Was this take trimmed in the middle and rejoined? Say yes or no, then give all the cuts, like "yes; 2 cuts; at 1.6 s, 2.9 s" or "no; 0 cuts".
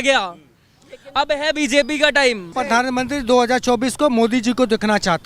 yes; 1 cut; at 2.5 s